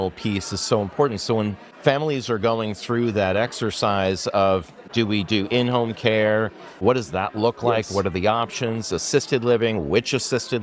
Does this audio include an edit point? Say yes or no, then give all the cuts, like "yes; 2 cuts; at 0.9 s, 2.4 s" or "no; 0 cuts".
yes; 3 cuts; at 1.6 s, 4.8 s, 6.8 s